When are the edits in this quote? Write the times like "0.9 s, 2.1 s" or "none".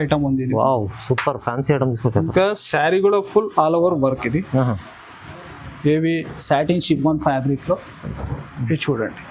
none